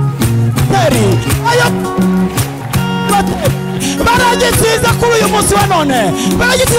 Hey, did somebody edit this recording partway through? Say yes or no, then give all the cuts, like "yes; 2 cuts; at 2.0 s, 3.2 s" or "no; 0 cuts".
no; 0 cuts